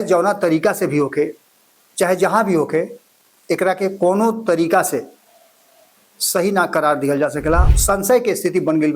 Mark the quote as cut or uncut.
cut